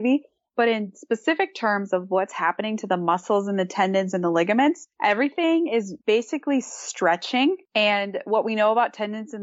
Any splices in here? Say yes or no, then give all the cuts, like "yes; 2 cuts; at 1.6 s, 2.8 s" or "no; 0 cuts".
yes; 3 cuts; at 4.9 s, 5.9 s, 7.6 s